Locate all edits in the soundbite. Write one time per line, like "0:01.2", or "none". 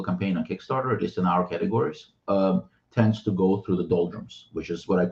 none